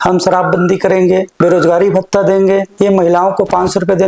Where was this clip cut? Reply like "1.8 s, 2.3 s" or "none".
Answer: 1.3 s, 2.7 s